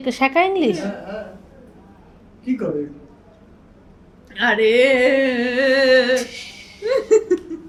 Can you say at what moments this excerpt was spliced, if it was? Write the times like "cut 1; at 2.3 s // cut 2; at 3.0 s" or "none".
none